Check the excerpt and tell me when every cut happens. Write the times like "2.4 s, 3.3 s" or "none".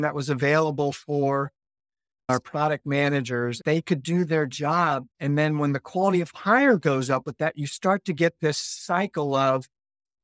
2.3 s, 3.6 s, 5.1 s